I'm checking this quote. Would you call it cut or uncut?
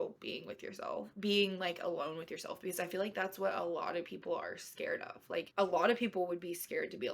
cut